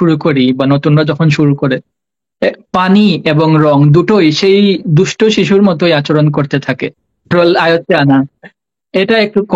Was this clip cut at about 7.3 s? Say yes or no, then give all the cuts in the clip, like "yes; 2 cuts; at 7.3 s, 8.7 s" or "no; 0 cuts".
yes; 1 cut; at 7.3 s